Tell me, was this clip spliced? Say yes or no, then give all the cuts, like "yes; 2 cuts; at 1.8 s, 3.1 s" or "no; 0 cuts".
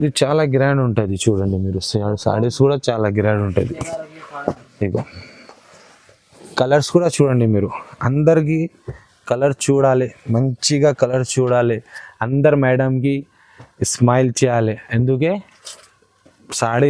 no; 0 cuts